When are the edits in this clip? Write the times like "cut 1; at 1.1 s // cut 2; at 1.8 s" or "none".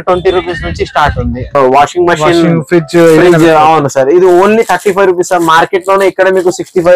cut 1; at 1.5 s

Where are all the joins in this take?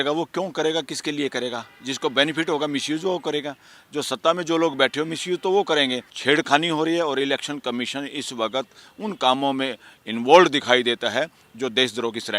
cut 1; at 6.1 s

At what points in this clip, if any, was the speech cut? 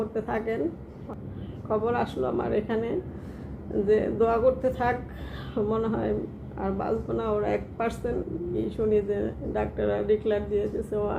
cut 1; at 0.9 s // cut 2; at 8.5 s

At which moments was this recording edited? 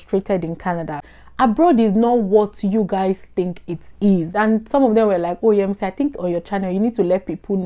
cut 1; at 1.0 s // cut 2; at 4.3 s

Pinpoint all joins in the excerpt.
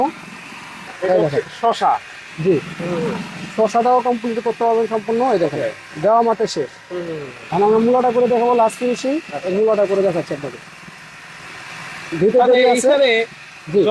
cut 1; at 0.9 s

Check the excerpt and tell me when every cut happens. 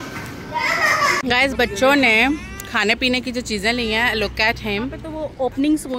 cut 1; at 1.2 s // cut 2; at 5.1 s

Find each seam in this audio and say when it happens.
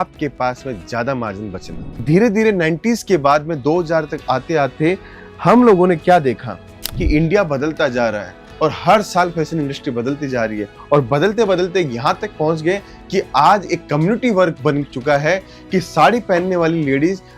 cut 1; at 2.0 s

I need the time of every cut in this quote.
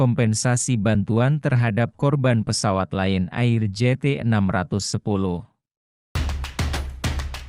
cut 1; at 6.0 s

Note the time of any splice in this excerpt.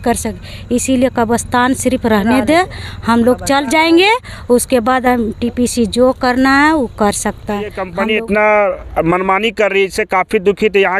cut 1; at 7.9 s

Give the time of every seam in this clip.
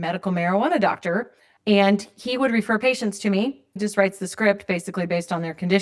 cut 1; at 1.5 s // cut 2; at 3.8 s

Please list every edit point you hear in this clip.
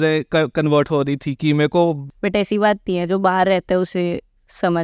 cut 1; at 2.1 s

